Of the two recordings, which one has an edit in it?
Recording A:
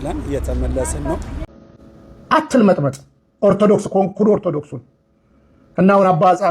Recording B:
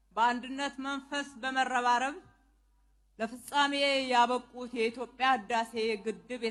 A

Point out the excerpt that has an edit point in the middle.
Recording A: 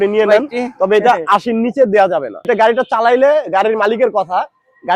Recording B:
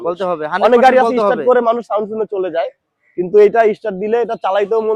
A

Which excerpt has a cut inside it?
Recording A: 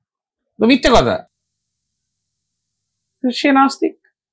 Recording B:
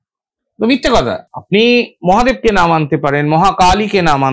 B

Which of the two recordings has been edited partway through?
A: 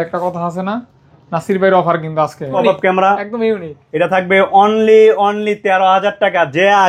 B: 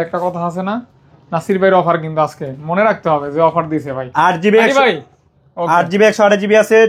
A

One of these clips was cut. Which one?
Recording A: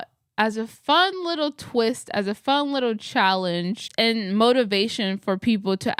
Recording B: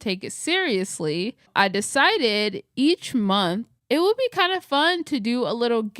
B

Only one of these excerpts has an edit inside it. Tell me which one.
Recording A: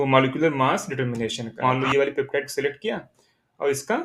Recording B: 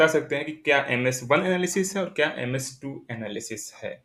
A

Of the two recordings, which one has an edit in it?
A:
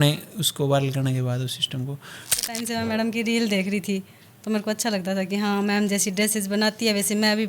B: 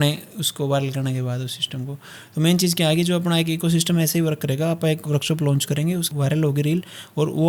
A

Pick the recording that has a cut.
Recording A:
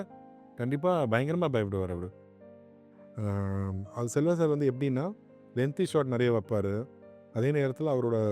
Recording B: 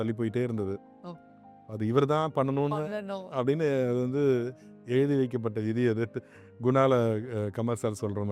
A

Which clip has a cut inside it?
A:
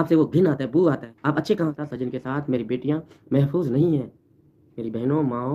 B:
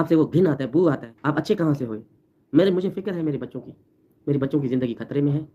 A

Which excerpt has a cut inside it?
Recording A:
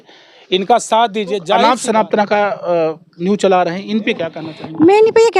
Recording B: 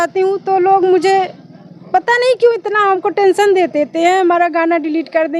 A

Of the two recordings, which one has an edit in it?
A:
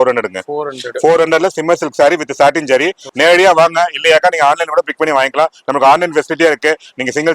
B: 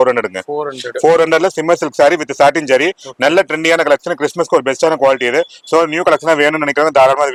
A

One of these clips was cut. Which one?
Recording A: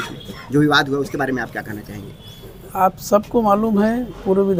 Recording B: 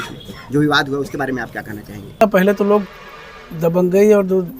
B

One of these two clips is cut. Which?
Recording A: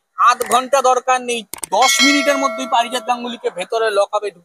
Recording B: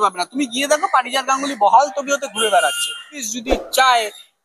B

